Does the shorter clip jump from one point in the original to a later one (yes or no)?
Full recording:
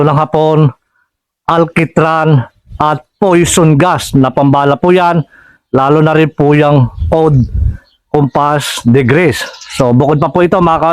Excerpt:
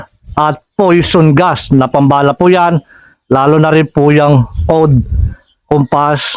no